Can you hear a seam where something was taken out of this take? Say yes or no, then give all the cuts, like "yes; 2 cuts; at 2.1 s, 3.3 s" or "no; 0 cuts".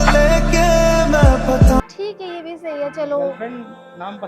yes; 1 cut; at 1.9 s